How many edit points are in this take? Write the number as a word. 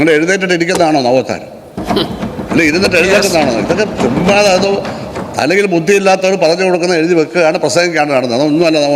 one